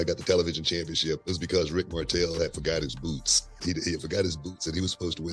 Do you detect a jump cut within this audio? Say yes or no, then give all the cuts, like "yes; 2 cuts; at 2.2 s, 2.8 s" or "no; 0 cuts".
yes; 2 cuts; at 1.2 s, 3.6 s